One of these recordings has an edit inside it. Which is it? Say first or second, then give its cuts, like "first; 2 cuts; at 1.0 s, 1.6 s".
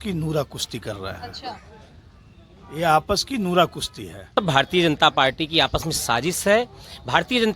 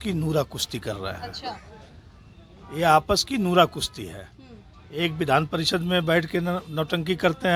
first; 1 cut; at 4.3 s